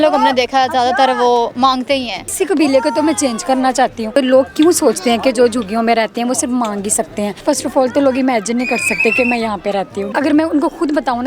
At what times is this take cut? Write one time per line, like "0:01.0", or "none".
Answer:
0:02.3
0:04.2
0:07.4
0:10.1